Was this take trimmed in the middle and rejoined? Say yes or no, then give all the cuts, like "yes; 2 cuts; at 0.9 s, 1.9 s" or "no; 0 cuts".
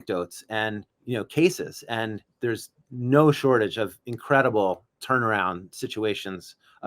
yes; 2 cuts; at 0.9 s, 2.2 s